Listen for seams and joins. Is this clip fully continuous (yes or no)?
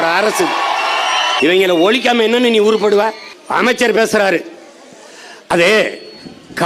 no